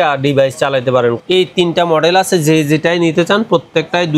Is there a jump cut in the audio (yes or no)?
yes